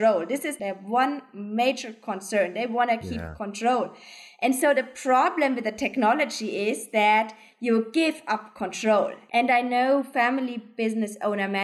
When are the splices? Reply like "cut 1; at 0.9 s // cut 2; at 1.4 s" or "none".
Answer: cut 1; at 9.2 s